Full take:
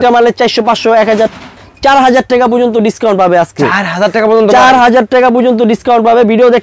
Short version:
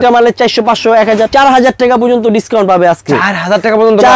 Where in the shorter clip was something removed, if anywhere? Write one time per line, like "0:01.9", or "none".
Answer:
0:01.3